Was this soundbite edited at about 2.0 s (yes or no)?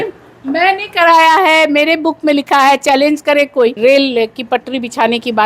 no